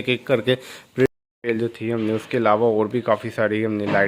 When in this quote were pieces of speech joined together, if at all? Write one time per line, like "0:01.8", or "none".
0:01.1